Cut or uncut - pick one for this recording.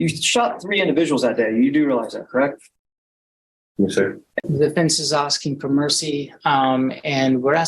cut